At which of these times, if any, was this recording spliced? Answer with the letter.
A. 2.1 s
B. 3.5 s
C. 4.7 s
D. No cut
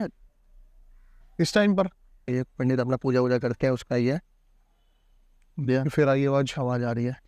A